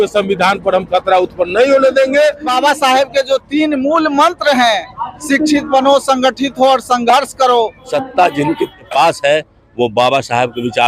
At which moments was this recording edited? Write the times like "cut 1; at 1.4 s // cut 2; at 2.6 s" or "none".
cut 1; at 2.5 s // cut 2; at 7.8 s // cut 3; at 8.8 s